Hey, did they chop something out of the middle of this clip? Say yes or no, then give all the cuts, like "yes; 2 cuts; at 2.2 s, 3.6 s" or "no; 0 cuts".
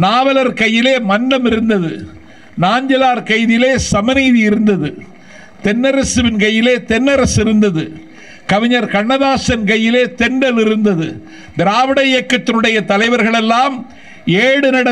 no; 0 cuts